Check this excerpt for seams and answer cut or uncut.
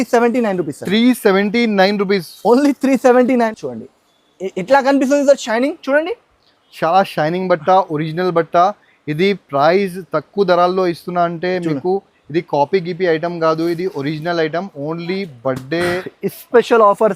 cut